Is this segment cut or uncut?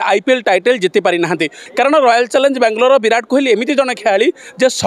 cut